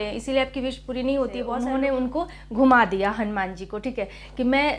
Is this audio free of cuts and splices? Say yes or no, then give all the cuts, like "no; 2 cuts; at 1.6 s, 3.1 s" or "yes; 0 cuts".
no; 1 cut; at 1.5 s